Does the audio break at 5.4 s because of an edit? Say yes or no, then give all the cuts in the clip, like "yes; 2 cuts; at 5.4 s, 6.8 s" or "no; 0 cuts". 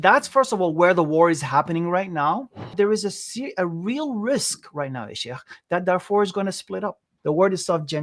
no; 2 cuts; at 2.6 s, 7.1 s